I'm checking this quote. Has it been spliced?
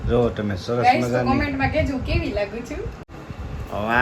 yes; 1 cut; at 3.0 s

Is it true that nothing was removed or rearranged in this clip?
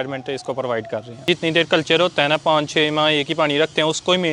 no; 1 cut; at 1.3 s

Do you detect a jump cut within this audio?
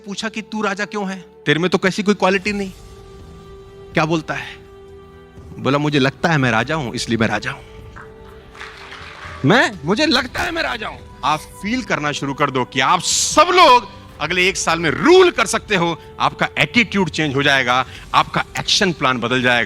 yes; 1 cut; at 11.1 s

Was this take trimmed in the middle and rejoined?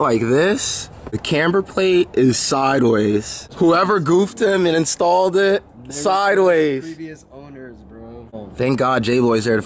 yes; 3 cuts; at 1.2 s, 3.4 s, 8.3 s

